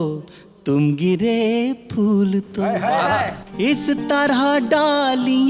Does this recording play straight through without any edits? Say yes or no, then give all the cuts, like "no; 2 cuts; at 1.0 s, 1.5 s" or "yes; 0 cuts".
yes; 0 cuts